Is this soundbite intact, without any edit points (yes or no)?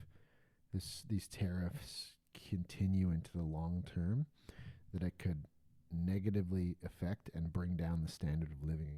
yes